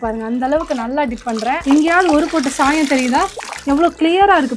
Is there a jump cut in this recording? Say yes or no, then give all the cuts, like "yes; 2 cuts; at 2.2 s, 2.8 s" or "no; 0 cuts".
yes; 2 cuts; at 1.6 s, 3.4 s